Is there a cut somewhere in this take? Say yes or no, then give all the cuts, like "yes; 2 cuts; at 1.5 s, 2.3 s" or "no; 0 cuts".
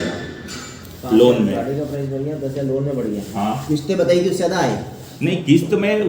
no; 0 cuts